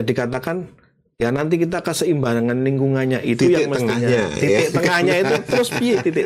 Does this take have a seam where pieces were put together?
no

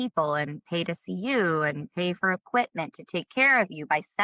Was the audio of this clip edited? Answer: no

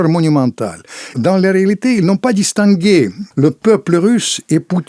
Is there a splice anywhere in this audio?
yes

